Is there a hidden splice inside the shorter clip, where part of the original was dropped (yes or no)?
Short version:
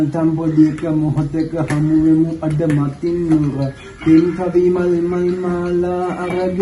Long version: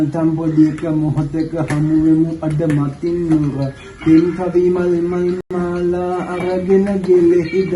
yes